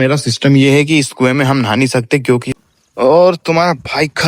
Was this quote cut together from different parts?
yes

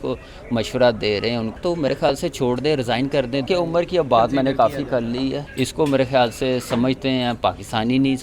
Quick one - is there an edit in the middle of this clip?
yes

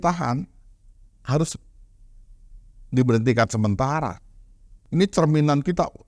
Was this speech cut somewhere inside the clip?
yes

